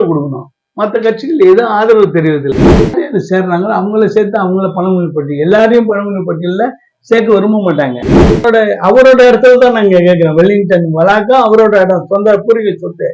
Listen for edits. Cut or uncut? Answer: cut